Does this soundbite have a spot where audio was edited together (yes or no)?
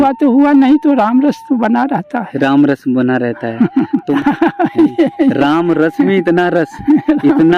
yes